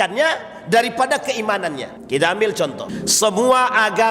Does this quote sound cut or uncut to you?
cut